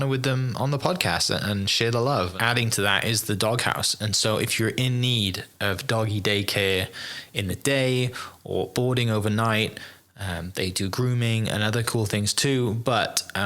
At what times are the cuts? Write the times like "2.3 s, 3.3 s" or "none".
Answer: 2.3 s